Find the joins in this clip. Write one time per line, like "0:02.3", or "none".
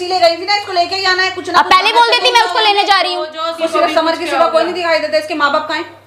0:03.6